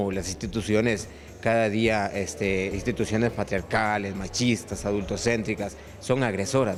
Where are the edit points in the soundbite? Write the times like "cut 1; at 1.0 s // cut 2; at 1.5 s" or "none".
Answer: none